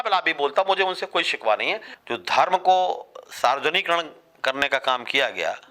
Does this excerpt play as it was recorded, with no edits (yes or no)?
no